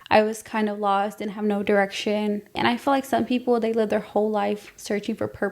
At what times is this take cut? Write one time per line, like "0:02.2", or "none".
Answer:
0:02.5